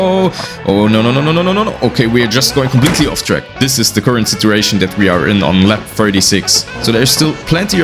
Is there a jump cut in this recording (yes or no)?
yes